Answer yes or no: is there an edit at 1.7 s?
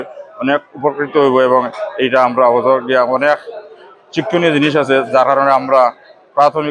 no